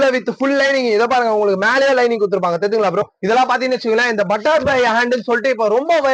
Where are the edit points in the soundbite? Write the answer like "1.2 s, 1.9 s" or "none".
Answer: 3.0 s